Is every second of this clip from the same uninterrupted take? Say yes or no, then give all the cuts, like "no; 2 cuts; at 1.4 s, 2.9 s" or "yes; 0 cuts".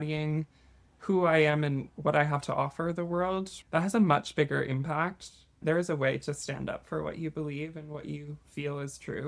no; 2 cuts; at 3.6 s, 5.6 s